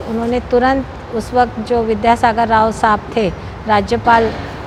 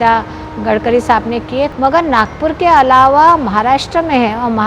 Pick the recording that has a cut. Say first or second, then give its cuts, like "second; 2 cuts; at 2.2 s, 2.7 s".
second; 1 cut; at 1.7 s